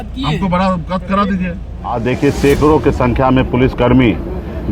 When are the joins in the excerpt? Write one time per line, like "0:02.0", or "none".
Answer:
0:01.9